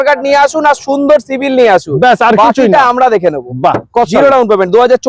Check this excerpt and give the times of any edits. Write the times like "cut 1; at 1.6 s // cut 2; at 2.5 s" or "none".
none